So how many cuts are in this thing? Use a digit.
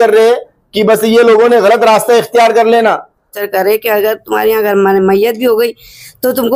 1